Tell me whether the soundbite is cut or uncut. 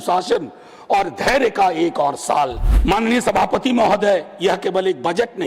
cut